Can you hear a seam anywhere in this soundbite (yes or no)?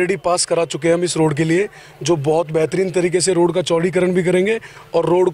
no